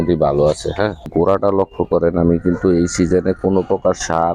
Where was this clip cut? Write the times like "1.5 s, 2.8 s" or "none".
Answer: 1.1 s